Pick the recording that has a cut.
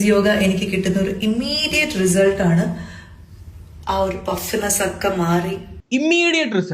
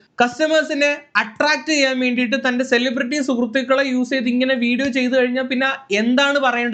first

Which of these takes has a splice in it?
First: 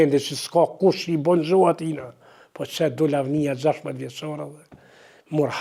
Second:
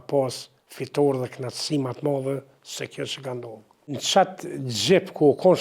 second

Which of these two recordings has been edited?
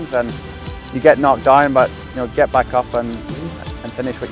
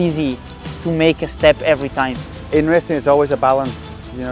second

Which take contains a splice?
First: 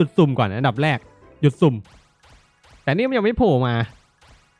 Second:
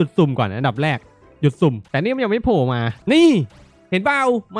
second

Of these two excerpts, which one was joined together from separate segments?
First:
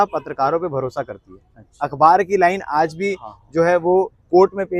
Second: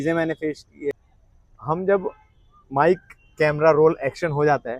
second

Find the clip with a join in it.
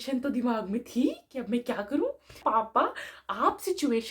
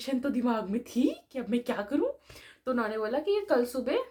first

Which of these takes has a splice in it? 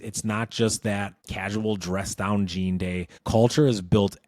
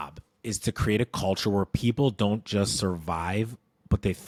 first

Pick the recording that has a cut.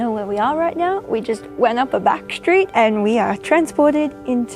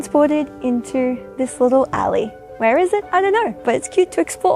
first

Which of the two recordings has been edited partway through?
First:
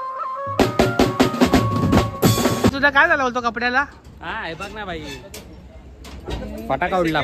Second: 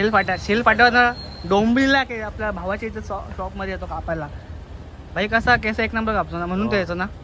first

